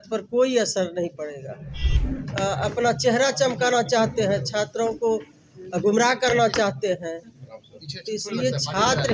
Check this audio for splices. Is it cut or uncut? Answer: cut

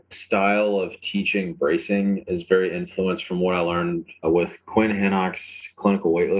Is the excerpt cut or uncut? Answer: uncut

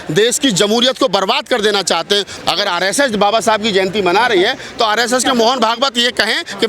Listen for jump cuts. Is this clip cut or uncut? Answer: cut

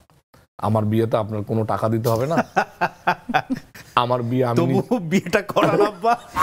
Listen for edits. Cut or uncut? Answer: uncut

